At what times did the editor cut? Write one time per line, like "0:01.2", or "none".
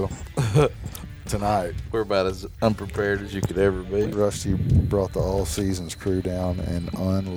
0:04.0